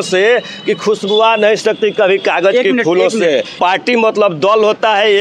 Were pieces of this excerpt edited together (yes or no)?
yes